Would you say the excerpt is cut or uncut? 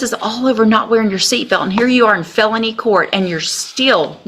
uncut